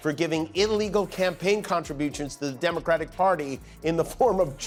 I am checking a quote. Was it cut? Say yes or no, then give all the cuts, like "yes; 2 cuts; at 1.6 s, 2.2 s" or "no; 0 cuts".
no; 0 cuts